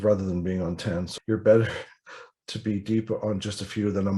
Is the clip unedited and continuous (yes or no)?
no